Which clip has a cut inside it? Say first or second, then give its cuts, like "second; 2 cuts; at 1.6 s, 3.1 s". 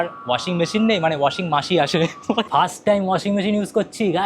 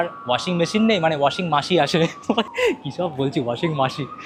first; 1 cut; at 2.5 s